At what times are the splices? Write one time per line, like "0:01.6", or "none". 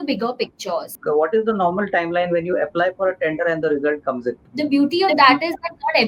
0:00.9
0:04.4